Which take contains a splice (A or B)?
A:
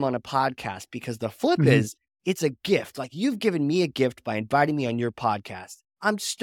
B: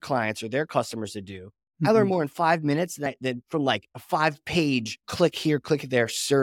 B